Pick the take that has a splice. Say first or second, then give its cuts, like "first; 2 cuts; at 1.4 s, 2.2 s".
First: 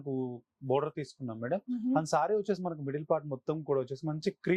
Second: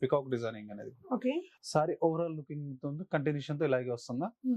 second; 1 cut; at 1.5 s